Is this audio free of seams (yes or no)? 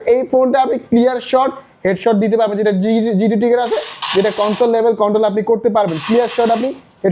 yes